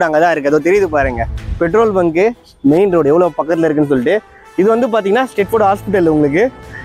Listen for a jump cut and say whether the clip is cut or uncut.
uncut